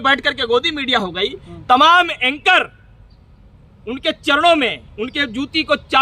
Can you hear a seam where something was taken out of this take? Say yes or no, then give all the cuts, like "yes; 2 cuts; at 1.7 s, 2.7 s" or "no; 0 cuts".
no; 0 cuts